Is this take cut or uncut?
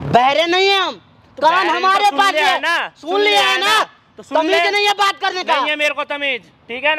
uncut